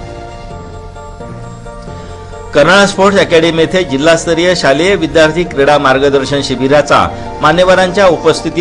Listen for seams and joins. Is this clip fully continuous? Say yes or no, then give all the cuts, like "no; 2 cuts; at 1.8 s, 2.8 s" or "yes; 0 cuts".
yes; 0 cuts